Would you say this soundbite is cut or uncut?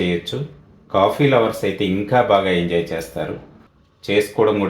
cut